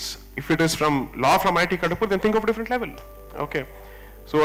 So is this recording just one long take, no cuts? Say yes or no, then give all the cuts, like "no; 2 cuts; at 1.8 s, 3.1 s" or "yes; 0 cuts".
yes; 0 cuts